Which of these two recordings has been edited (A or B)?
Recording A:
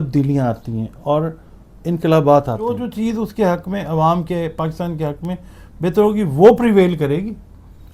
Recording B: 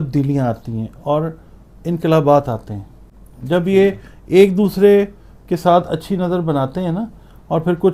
A